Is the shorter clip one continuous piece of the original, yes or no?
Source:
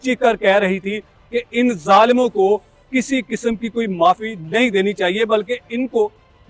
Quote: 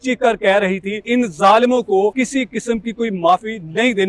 no